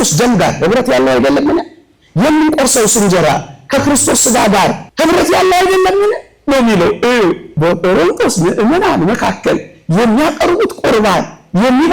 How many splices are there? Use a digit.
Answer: 2